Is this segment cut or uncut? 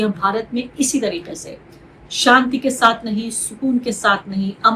uncut